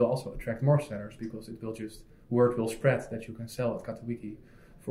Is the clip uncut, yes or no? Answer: yes